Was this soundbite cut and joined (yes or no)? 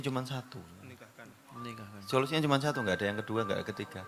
no